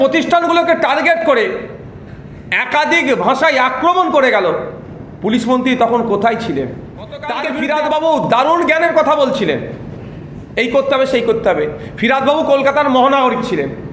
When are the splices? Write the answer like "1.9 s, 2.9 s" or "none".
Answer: 7.4 s